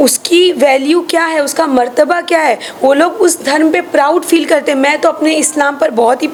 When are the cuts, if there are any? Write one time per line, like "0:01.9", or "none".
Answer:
none